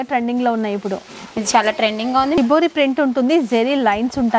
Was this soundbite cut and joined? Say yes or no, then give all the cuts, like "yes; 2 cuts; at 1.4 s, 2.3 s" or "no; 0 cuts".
yes; 1 cut; at 2.4 s